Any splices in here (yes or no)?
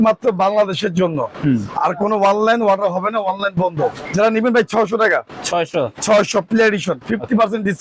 yes